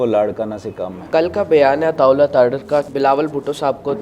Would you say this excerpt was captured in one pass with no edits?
no; 2 cuts; at 1.0 s, 2.9 s

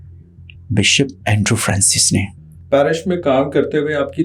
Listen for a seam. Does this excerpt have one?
yes; 1 cut; at 2.5 s

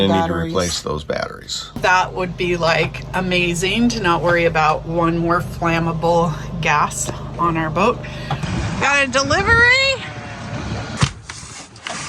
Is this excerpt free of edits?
no; 3 cuts; at 1.8 s, 8.4 s, 10.9 s

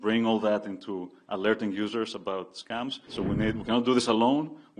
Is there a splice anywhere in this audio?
yes; 1 cut; at 3.0 s

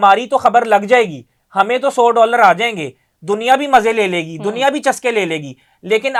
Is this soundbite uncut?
yes; 0 cuts

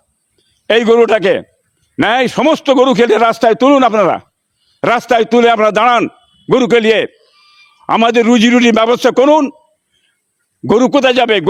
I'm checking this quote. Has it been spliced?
no; 0 cuts

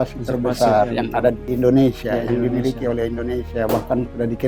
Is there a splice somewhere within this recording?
no; 0 cuts

